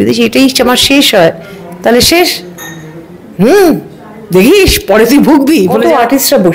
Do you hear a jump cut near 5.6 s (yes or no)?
yes